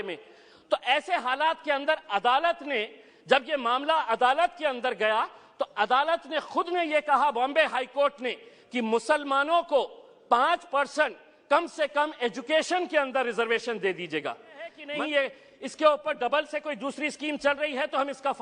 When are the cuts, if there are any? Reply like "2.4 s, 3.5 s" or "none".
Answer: 14.8 s

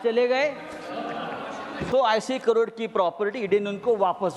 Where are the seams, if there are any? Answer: 1.8 s

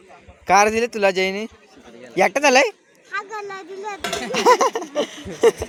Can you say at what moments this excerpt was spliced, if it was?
none

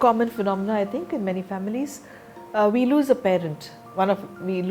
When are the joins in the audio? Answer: none

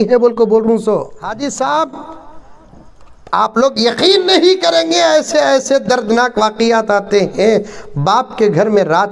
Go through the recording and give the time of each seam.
1.2 s

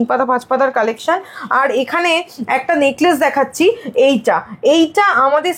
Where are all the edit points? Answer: none

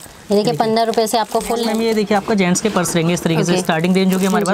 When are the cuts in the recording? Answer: 1.7 s

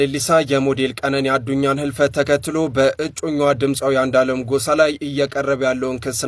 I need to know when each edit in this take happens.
none

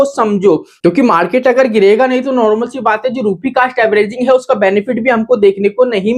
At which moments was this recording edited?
none

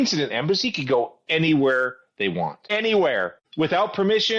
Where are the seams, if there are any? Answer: 2.6 s, 3.4 s

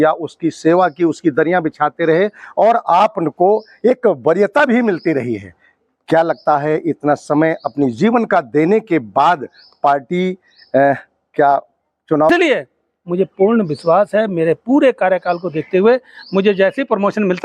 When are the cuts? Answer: 12.3 s

